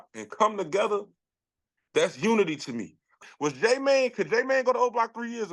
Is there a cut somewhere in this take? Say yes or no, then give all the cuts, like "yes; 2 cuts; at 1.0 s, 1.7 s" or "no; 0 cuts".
yes; 1 cut; at 3.2 s